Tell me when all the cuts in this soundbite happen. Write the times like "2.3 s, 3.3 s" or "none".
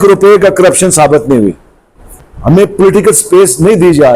2.3 s